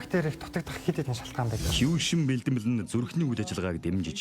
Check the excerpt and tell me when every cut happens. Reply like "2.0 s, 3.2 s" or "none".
1.6 s